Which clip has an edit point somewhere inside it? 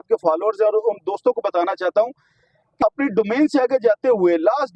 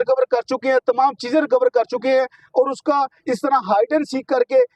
first; 1 cut; at 2.8 s

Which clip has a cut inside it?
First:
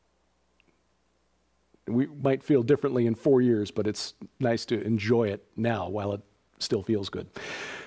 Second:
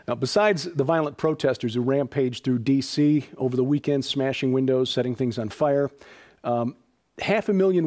second; 1 cut; at 3.5 s

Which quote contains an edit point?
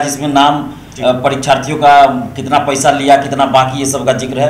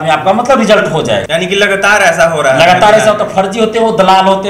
second; 1 cut; at 1.2 s

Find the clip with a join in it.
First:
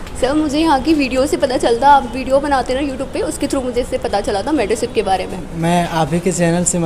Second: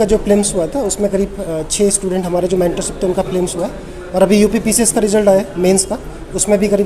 first; 1 cut; at 5.4 s

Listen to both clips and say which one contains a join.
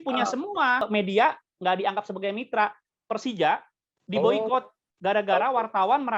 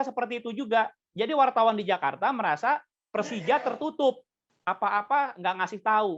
first; 2 cuts; at 0.9 s, 2.9 s

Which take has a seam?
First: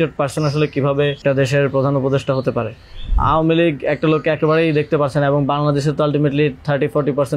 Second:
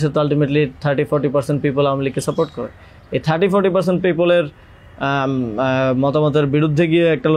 first; 2 cuts; at 1.2 s, 3.1 s

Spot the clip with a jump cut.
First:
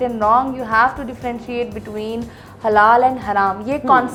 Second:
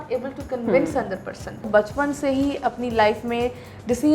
second; 1 cut; at 1.6 s

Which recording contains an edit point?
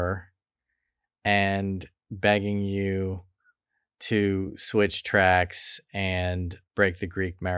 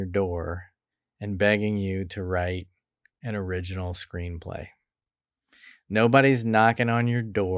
first; 1 cut; at 6.5 s

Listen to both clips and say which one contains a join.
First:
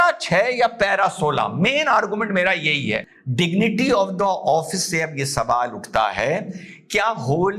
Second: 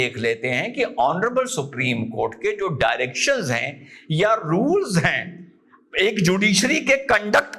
first; 1 cut; at 3.1 s

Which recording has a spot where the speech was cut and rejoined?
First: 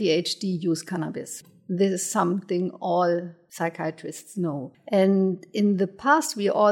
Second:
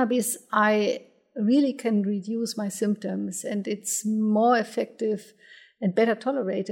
first; 3 cuts; at 1.4 s, 3.4 s, 4.7 s

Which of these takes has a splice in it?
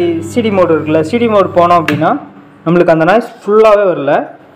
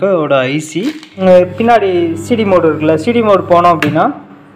second; 1 cut; at 1.0 s

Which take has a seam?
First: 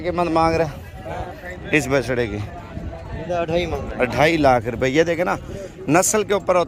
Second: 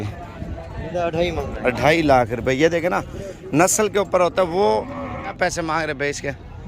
second; 1 cut; at 5.3 s

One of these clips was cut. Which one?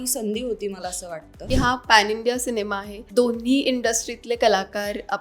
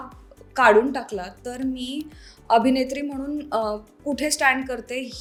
first; 2 cuts; at 1.4 s, 3.0 s

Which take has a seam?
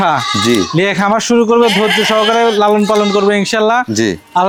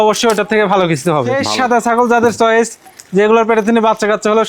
second; 1 cut; at 1.4 s

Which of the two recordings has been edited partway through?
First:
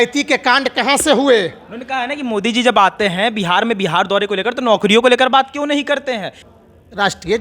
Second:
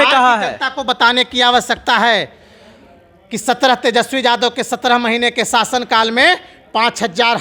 first; 1 cut; at 6.4 s

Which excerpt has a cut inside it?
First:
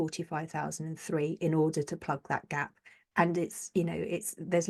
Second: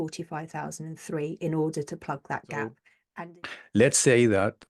second; 1 cut; at 3.2 s

